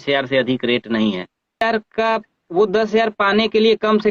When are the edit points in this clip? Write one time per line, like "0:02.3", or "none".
0:01.6